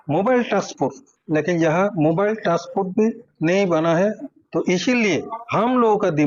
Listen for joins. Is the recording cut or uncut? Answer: uncut